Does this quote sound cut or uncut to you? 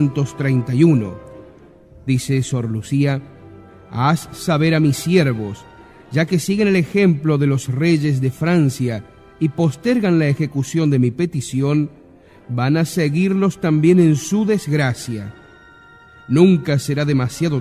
uncut